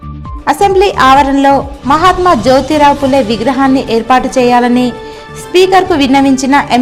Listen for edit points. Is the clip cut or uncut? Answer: uncut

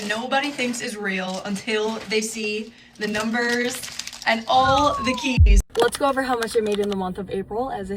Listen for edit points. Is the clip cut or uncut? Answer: cut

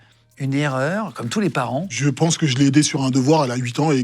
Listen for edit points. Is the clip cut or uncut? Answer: cut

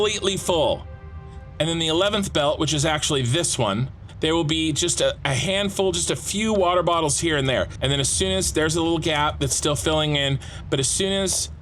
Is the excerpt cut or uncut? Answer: cut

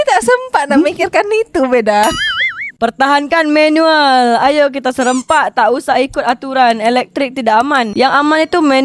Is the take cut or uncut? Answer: uncut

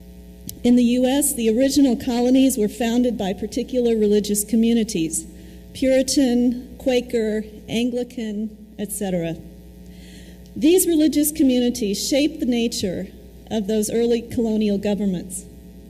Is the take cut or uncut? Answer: cut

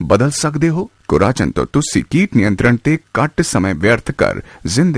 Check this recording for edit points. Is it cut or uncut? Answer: cut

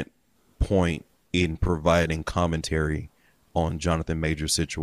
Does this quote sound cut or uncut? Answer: uncut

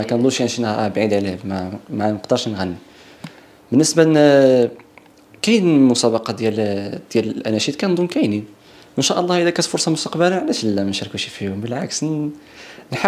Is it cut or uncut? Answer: uncut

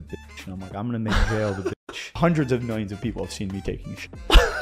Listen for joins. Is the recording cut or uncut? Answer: cut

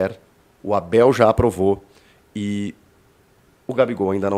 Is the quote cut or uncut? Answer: uncut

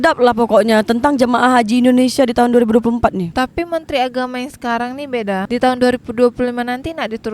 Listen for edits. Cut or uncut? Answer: cut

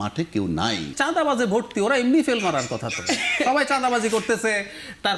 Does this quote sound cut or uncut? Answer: cut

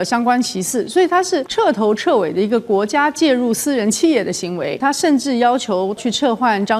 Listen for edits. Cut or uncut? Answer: cut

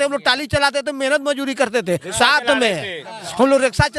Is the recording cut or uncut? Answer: uncut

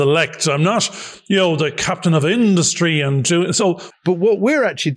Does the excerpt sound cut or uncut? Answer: cut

